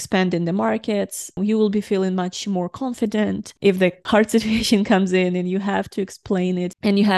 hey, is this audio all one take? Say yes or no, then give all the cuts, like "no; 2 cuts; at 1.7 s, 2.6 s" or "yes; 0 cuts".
no; 2 cuts; at 1.3 s, 4.0 s